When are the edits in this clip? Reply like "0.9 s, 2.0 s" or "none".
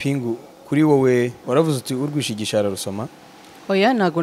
1.4 s

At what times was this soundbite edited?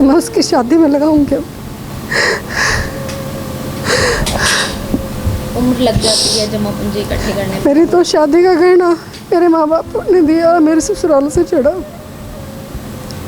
1.9 s

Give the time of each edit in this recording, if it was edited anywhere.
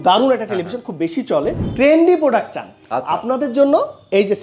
1.6 s

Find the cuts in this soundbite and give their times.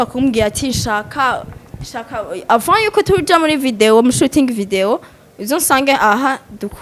none

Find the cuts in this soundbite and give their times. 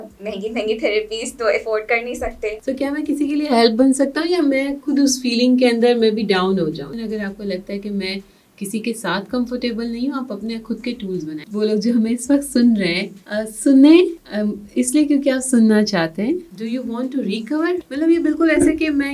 2.6 s, 6.9 s, 11.4 s, 16.5 s, 17.8 s

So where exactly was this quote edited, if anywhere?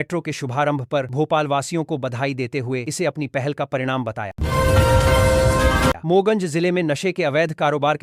4.3 s, 6.0 s

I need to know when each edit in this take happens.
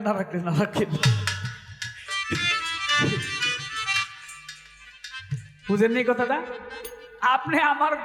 none

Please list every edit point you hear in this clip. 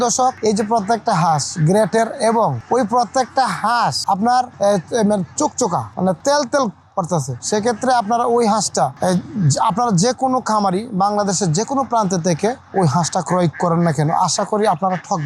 none

